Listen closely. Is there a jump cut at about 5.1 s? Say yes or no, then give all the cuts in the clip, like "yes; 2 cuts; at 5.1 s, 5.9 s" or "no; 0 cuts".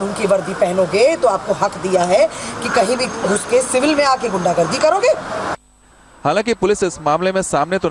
no; 1 cut; at 2.8 s